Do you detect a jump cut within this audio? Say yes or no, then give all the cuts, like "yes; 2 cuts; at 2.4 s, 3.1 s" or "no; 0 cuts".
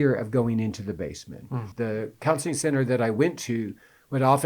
yes; 1 cut; at 1.7 s